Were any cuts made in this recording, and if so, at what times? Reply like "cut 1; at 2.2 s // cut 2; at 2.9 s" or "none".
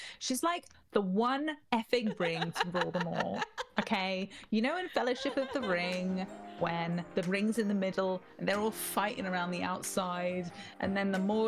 none